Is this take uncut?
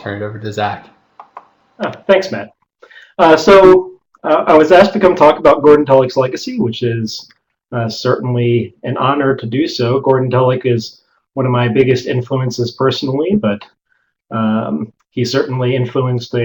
no; 1 cut; at 1.3 s

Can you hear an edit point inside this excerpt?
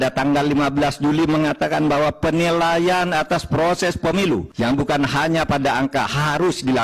yes; 1 cut; at 4.5 s

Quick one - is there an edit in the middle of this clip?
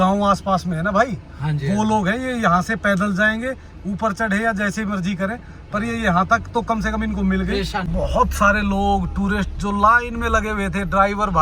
yes; 1 cut; at 7.8 s

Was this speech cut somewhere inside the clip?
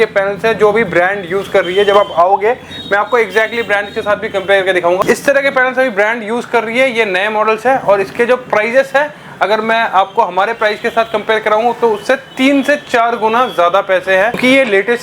no; 0 cuts

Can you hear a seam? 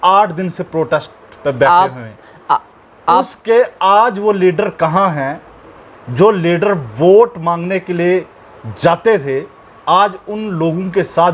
no; 0 cuts

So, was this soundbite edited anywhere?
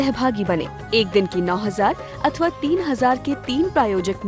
no; 0 cuts

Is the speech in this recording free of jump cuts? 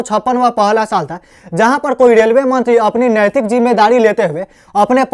yes; 0 cuts

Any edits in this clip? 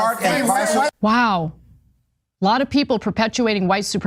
yes; 1 cut; at 0.9 s

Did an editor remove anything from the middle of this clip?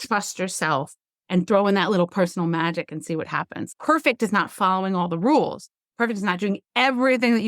yes; 1 cut; at 3.6 s

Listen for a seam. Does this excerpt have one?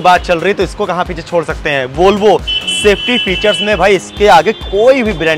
no; 0 cuts

